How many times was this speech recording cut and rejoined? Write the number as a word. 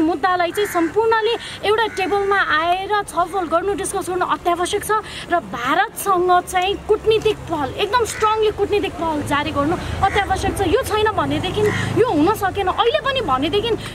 zero